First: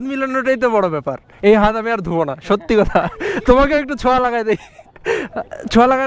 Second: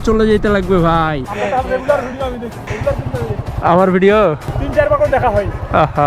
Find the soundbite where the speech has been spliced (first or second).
second